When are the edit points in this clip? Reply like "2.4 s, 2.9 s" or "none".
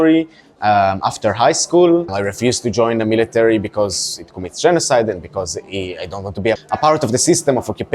2.2 s, 6.6 s